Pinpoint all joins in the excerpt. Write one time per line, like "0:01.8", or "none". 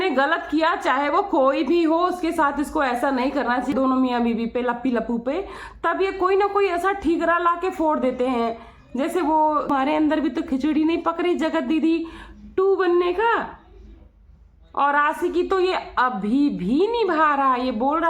0:03.7
0:09.7